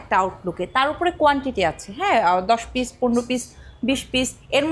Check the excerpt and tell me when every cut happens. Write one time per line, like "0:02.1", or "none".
none